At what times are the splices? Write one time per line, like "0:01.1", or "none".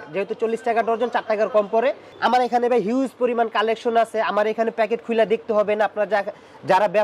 0:02.1